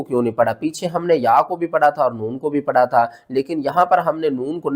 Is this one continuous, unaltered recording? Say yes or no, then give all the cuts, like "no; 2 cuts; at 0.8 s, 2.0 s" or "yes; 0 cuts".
yes; 0 cuts